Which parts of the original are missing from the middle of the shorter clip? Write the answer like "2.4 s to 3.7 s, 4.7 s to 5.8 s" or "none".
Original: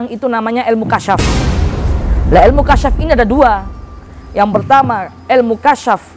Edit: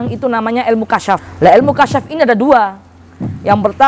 1.2 s to 2.1 s